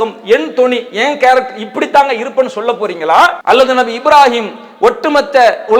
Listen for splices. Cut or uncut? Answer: cut